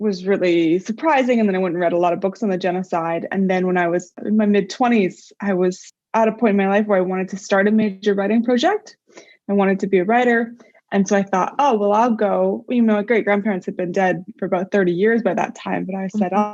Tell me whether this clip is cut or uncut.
uncut